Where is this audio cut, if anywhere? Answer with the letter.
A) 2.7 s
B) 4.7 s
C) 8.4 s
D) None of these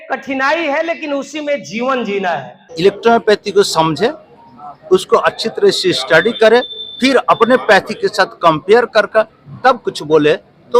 A